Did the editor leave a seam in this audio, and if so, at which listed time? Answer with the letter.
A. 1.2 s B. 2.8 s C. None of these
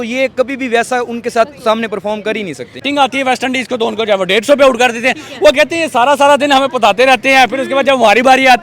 B